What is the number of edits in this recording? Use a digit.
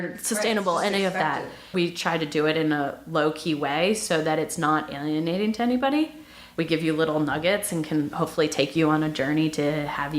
2